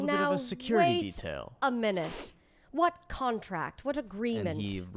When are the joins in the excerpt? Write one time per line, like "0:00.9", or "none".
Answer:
none